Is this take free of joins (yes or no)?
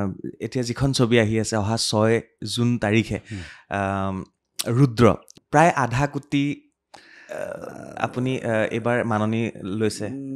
no